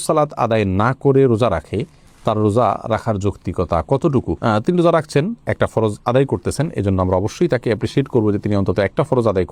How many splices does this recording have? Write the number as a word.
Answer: zero